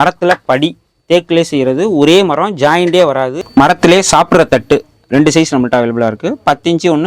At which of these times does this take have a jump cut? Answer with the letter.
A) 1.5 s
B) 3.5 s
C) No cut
B